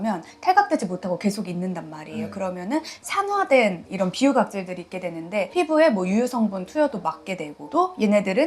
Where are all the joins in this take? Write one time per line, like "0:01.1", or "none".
none